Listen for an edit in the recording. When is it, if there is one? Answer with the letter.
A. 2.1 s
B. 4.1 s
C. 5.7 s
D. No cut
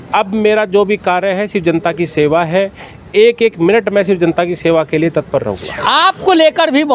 C